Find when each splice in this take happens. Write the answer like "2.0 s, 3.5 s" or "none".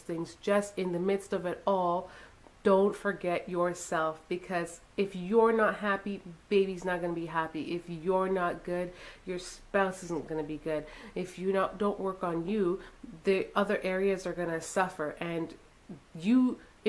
none

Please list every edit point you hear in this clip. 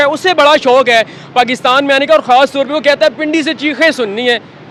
none

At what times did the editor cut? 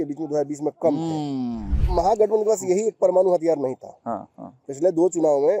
1.8 s

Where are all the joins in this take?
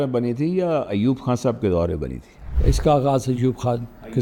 none

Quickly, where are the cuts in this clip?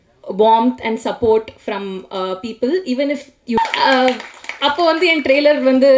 3.6 s

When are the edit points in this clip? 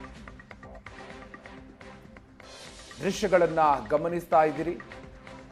2.2 s

